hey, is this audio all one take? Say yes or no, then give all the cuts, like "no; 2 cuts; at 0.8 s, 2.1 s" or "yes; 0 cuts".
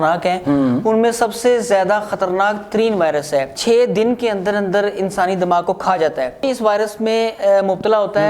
no; 1 cut; at 6.5 s